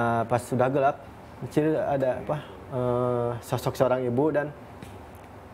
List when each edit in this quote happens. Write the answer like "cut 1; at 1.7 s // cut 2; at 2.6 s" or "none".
cut 1; at 1.1 s